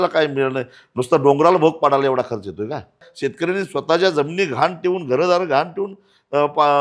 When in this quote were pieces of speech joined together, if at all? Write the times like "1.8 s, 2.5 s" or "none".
3.1 s